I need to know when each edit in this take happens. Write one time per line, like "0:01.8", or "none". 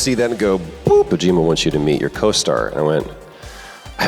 0:01.1